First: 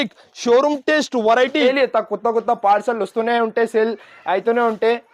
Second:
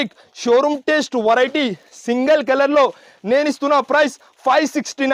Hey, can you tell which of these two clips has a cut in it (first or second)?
first